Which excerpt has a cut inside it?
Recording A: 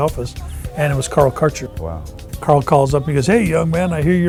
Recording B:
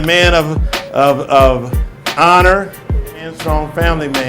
B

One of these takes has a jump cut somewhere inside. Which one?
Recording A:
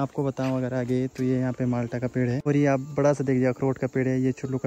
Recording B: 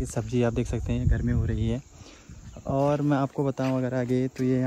A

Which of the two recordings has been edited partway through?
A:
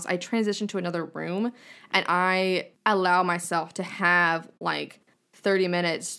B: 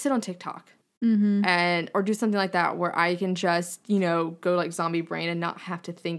A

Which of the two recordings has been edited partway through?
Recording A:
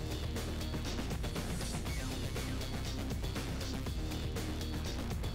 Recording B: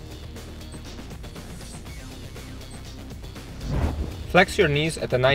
B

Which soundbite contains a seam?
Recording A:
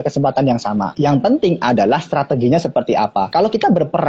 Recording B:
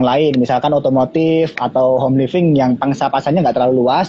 A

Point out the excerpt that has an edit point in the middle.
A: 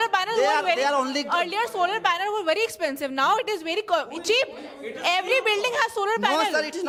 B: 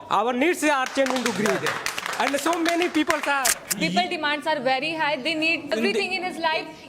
B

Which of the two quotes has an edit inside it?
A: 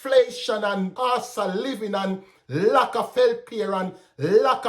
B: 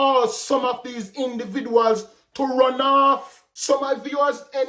A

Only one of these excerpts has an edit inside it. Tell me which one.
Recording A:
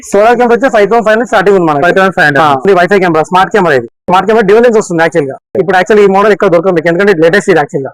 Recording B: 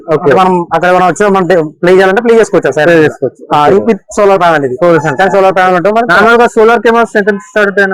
A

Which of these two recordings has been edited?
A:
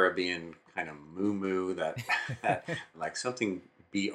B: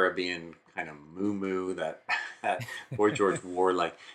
A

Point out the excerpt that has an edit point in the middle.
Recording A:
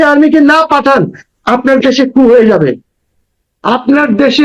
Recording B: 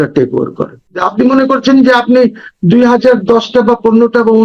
B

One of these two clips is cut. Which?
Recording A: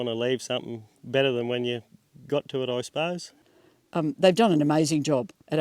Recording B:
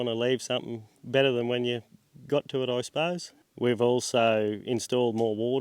A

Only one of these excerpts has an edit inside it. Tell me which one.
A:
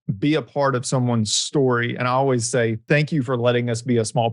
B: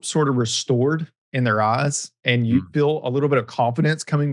A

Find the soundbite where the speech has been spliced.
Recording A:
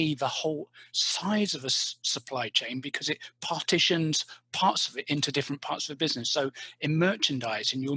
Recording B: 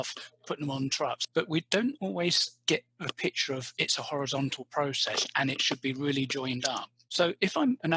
B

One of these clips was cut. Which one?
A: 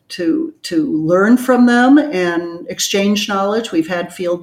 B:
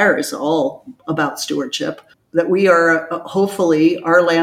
B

